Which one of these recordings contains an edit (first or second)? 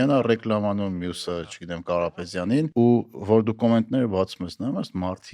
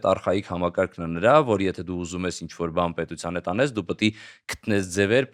first